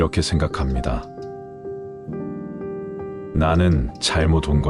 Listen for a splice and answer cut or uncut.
cut